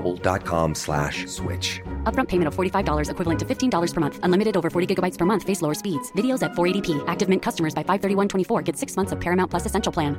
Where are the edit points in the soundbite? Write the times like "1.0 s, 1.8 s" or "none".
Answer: none